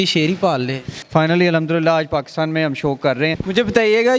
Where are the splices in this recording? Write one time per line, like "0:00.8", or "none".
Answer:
0:01.0
0:03.4